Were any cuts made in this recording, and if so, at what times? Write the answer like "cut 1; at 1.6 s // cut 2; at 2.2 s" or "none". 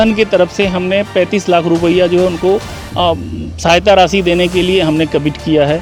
none